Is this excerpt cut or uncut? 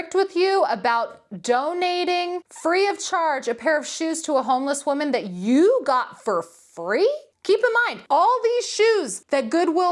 uncut